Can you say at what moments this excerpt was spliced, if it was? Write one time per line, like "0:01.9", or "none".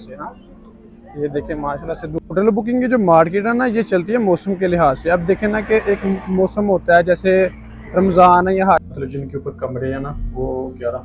0:02.3
0:08.9